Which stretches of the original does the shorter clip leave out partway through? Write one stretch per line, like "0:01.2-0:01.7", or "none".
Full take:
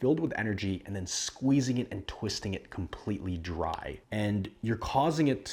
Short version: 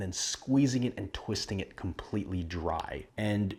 none